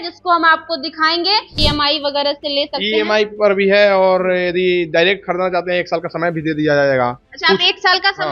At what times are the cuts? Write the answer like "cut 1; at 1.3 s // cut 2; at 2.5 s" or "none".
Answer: cut 1; at 1.6 s